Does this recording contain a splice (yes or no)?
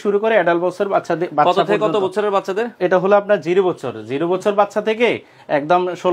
no